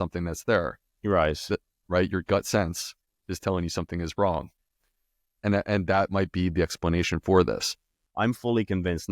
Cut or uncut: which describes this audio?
cut